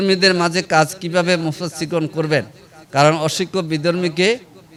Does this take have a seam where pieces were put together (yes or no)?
no